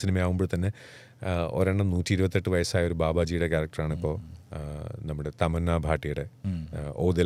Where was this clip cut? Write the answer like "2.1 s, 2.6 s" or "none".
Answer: none

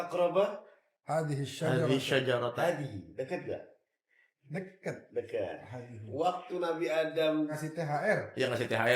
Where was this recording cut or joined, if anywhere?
7.5 s

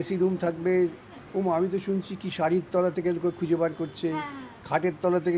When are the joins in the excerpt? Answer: 1.0 s

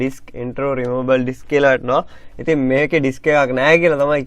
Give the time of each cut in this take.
1.6 s

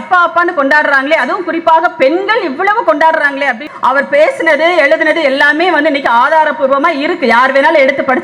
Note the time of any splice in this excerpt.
3.6 s

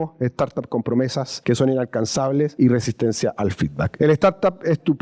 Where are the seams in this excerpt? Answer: 1.3 s, 2.5 s, 3.8 s

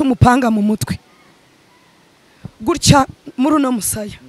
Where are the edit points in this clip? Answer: none

